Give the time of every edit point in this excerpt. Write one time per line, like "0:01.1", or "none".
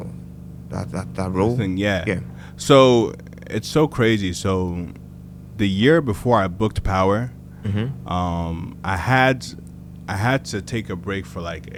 none